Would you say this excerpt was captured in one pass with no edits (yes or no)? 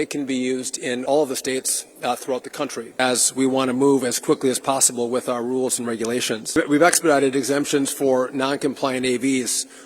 no